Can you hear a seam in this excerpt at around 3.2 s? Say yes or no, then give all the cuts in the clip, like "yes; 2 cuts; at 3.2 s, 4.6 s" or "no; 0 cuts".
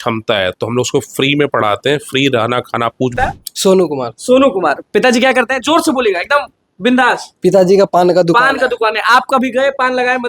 yes; 1 cut; at 3.2 s